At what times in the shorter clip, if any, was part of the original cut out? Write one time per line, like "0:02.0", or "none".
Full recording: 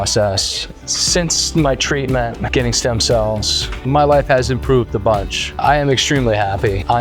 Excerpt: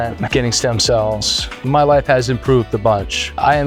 none